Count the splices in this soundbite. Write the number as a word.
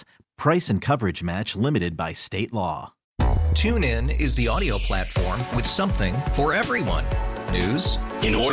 one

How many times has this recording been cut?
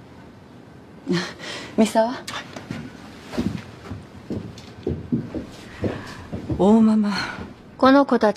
zero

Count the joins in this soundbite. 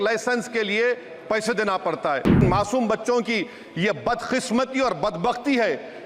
one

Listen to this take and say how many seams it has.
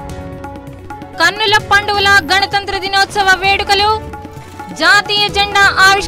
one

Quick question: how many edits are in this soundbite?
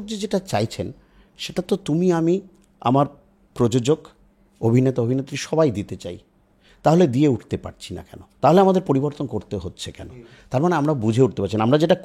zero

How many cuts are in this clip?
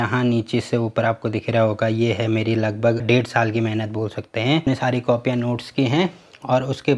two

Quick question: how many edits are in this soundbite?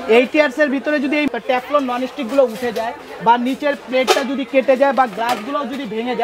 one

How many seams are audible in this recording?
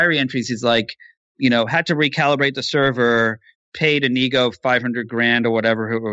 zero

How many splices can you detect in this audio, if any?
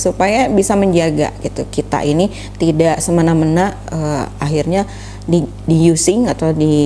zero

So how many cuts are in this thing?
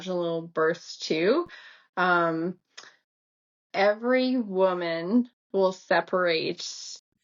zero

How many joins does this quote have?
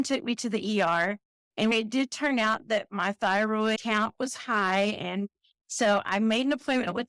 one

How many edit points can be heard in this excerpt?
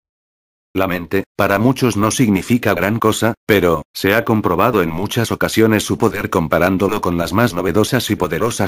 one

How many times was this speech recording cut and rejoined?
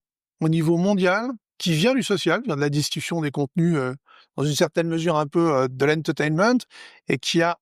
one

